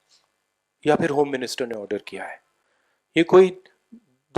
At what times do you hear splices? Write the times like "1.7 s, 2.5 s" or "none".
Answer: none